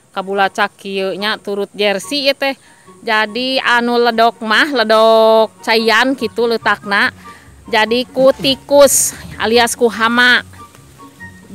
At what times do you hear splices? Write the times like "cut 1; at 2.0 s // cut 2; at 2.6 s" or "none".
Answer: none